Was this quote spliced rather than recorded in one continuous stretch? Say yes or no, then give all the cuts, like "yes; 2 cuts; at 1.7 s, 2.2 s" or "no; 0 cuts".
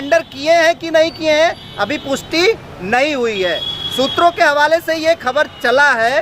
no; 0 cuts